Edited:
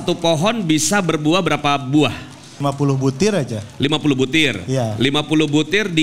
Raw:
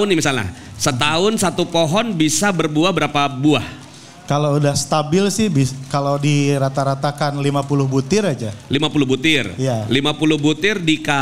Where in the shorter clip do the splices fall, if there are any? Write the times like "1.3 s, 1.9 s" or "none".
2.6 s